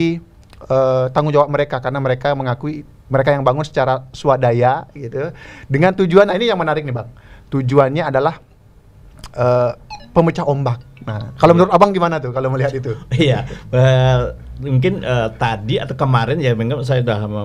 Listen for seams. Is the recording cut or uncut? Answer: uncut